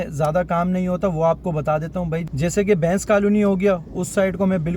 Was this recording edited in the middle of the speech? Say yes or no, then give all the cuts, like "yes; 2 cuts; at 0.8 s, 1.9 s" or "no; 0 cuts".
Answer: no; 0 cuts